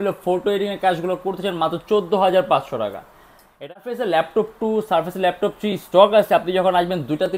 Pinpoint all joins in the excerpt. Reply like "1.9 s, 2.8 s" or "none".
3.8 s

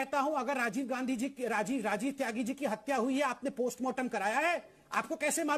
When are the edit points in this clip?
none

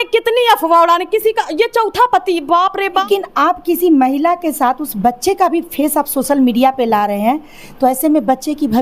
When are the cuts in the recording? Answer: 3.0 s

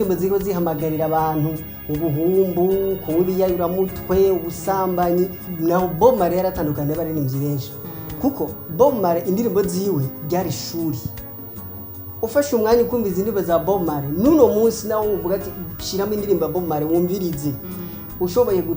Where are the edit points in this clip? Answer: 5.4 s

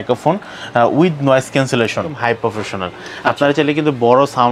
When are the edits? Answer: 2.2 s

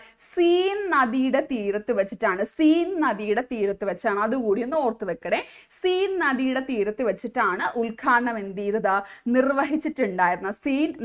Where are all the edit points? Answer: none

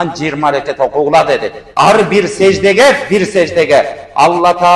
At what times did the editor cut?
1.6 s

